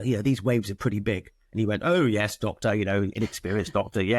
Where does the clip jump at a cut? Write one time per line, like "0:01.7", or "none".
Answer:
none